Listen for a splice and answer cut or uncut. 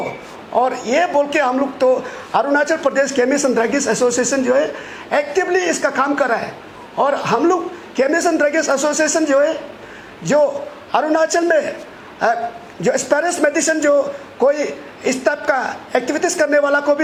uncut